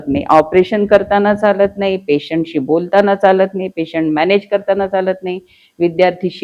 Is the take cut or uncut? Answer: uncut